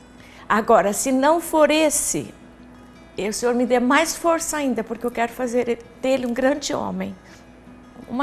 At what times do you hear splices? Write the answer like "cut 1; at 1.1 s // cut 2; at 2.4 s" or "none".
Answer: cut 1; at 7.3 s